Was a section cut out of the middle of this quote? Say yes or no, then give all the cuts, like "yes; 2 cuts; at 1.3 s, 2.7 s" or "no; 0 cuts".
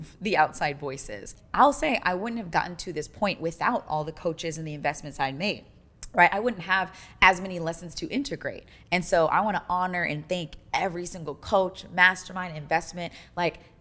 no; 0 cuts